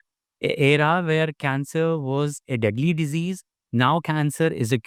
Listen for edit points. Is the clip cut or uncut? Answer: uncut